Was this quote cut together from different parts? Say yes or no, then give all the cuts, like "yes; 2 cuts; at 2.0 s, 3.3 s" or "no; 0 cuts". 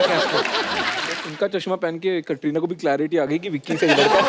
yes; 1 cut; at 1.2 s